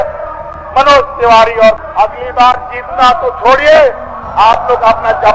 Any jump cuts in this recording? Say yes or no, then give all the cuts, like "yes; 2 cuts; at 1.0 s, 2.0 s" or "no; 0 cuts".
yes; 1 cut; at 1.8 s